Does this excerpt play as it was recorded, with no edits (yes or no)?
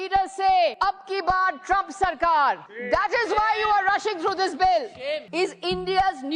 no